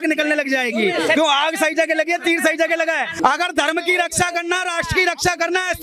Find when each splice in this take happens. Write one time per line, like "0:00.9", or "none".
0:03.1